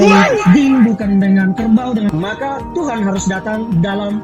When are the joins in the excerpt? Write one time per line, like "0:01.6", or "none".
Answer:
0:02.1

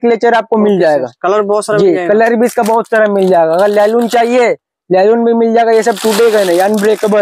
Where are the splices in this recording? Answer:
none

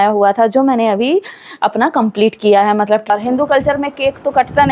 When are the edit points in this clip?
0:03.1

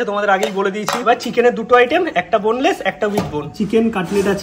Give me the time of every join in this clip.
0:01.0
0:03.5

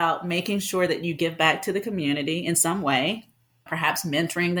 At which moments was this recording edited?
0:03.7

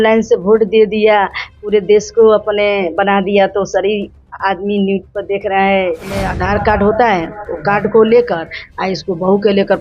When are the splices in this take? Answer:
0:06.3

